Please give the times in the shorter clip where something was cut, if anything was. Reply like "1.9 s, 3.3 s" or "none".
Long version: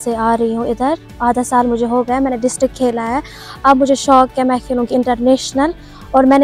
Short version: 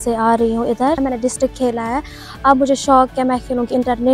1.0 s